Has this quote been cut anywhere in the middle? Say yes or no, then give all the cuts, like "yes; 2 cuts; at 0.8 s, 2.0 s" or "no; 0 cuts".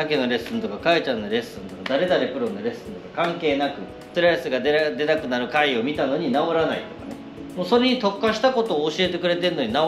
no; 0 cuts